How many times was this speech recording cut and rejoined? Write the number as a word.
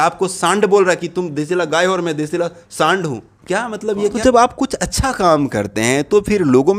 one